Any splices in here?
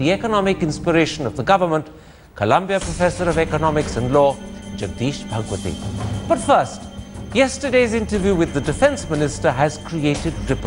yes; 1 cut; at 6.1 s

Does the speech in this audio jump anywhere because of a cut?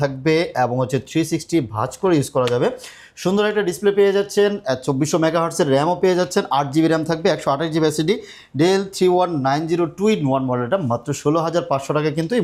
no; 0 cuts

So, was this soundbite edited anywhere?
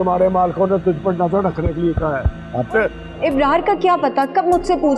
yes; 1 cut; at 3.0 s

